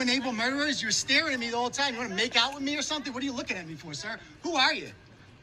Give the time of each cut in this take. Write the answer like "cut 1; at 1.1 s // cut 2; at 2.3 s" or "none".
none